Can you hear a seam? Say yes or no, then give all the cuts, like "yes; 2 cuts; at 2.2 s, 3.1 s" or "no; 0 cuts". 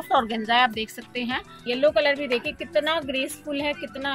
yes; 1 cut; at 1.6 s